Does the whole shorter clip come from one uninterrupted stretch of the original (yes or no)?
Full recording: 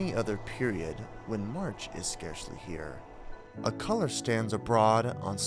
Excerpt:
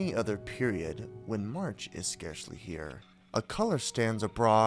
no